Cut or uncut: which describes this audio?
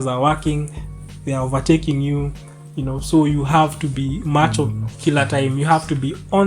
uncut